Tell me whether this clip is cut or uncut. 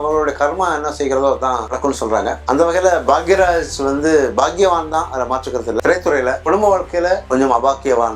uncut